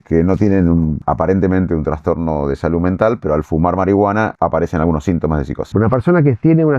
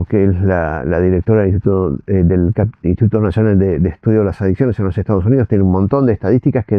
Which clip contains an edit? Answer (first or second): first